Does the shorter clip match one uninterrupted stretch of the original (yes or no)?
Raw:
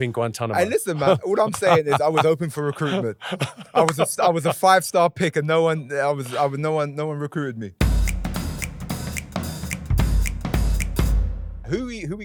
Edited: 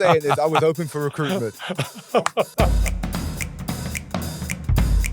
no